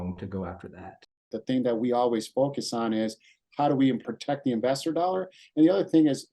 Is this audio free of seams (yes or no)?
no